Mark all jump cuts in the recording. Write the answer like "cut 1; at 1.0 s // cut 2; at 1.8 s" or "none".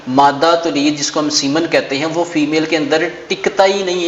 none